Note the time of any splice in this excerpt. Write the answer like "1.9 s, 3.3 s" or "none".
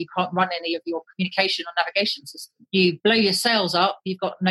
2.9 s